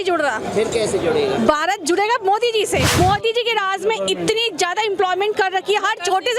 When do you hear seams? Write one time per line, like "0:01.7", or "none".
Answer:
0:03.0